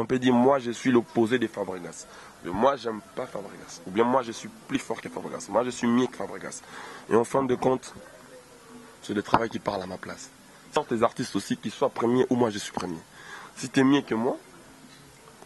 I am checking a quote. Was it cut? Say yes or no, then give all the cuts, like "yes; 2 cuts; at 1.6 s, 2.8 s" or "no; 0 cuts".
yes; 1 cut; at 10.8 s